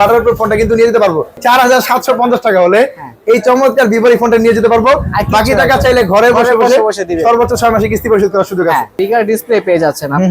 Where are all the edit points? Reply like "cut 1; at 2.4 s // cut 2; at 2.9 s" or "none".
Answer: cut 1; at 1.4 s // cut 2; at 8.9 s